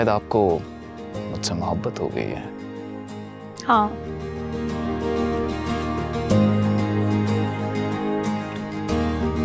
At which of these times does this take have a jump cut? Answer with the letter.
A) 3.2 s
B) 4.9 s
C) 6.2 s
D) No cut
D